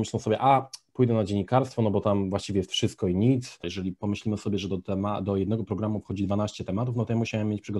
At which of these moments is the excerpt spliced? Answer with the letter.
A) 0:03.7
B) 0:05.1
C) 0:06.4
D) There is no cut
A